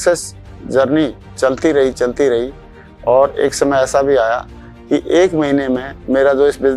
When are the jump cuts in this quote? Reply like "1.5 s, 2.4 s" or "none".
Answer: none